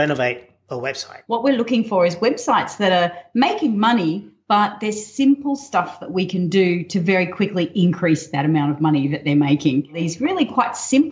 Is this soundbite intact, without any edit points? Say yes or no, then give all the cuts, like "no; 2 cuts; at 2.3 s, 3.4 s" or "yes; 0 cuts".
no; 2 cuts; at 1.2 s, 10.0 s